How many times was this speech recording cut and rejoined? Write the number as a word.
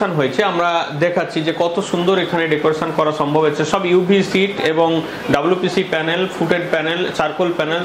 zero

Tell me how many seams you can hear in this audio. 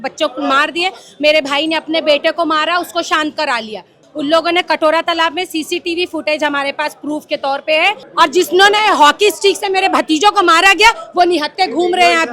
two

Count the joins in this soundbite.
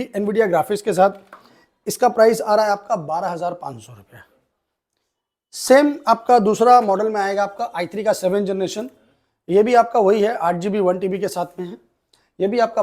zero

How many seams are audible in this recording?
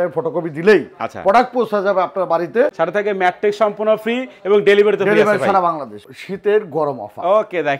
two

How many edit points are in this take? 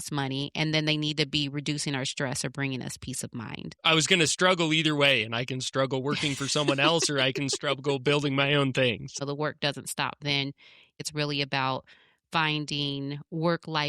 three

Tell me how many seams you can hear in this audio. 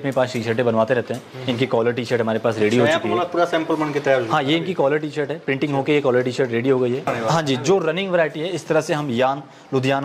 one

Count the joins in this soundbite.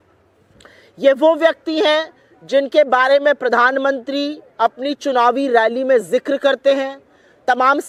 zero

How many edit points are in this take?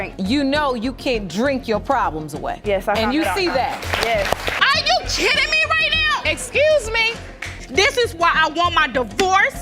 one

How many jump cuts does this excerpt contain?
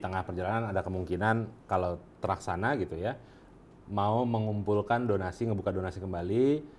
one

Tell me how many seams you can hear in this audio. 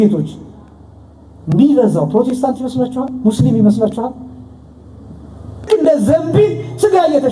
one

